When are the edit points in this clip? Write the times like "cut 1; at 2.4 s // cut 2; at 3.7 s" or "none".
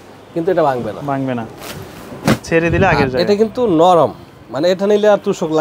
none